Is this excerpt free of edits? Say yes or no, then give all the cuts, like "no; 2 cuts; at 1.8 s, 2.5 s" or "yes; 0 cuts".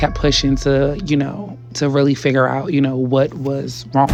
yes; 0 cuts